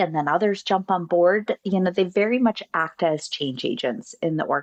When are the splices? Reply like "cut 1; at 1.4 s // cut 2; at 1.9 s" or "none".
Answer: none